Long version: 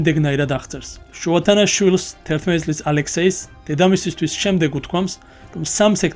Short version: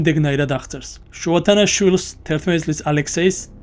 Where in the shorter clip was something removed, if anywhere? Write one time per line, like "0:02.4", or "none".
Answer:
none